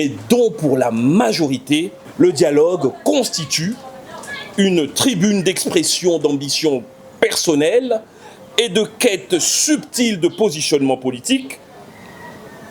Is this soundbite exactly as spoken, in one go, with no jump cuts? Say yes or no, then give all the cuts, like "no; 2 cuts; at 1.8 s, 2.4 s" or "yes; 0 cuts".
no; 1 cut; at 2.0 s